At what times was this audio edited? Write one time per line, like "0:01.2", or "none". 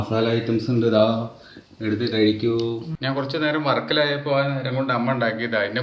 0:02.9